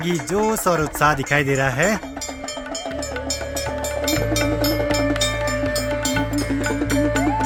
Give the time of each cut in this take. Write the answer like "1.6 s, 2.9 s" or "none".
none